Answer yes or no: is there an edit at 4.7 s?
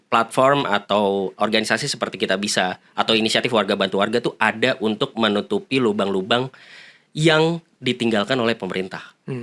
no